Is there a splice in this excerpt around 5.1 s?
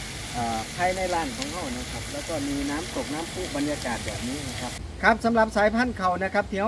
yes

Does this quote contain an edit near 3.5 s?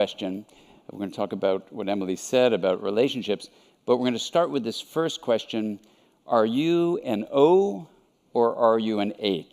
no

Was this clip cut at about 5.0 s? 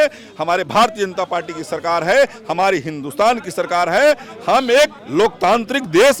yes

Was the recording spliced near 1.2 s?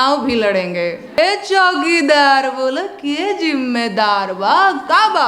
yes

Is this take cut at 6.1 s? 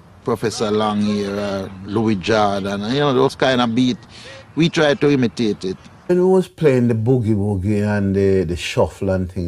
yes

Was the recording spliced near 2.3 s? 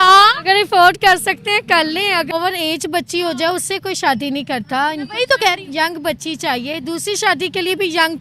yes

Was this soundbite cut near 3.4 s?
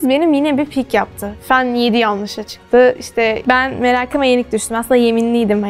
yes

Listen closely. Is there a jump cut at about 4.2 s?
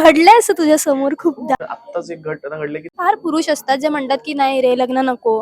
no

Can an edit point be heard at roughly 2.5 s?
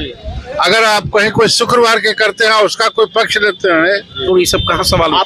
no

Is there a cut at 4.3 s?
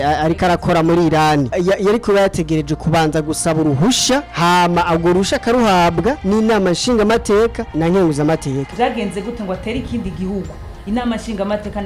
yes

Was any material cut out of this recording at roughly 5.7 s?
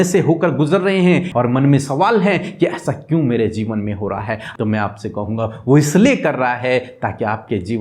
no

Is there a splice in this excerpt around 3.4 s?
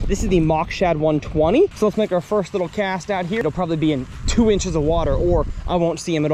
yes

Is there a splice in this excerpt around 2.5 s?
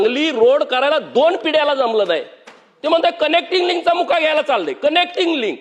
no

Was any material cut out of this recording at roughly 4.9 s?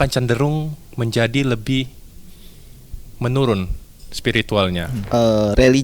yes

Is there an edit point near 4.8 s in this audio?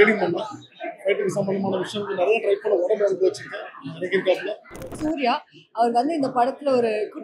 yes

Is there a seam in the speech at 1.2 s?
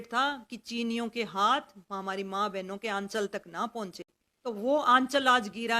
no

